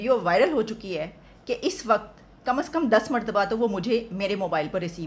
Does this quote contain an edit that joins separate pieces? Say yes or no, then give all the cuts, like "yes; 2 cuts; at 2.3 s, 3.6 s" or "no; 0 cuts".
no; 0 cuts